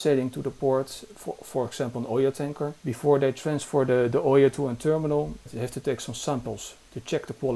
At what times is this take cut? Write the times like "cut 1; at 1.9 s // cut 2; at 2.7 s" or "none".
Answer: none